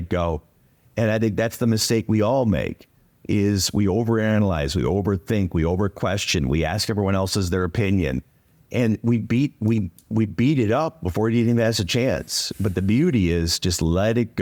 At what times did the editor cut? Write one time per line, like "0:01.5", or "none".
none